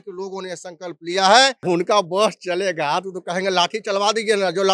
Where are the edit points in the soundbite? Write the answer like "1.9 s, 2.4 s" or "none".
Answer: 1.6 s